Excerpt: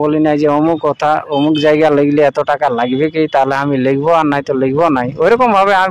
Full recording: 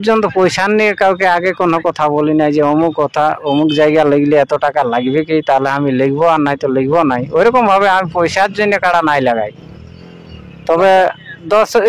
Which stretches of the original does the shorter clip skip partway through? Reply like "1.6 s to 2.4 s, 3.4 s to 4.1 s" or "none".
none